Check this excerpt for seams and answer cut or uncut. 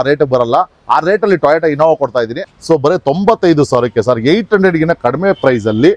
cut